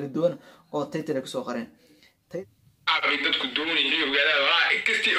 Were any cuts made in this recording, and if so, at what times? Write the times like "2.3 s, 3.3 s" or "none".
2.2 s